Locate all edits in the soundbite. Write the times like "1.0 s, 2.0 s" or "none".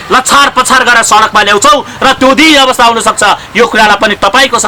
none